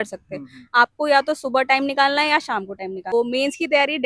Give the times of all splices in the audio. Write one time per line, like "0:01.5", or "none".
0:03.1

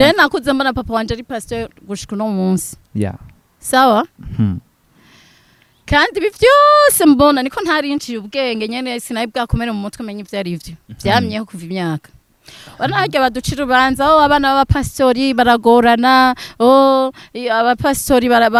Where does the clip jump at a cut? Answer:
none

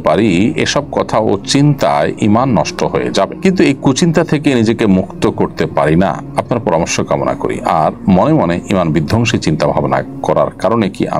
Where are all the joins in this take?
none

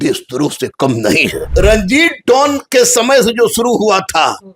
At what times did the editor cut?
0:01.5

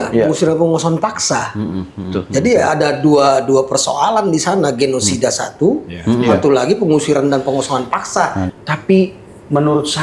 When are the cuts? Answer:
0:08.4

